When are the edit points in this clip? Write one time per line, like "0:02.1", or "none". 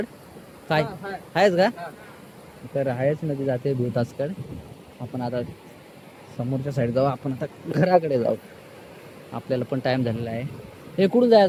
none